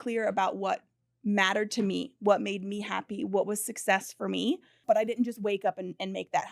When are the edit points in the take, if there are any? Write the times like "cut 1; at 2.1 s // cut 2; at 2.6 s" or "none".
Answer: cut 1; at 4.7 s